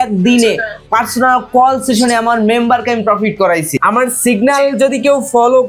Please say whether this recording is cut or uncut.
uncut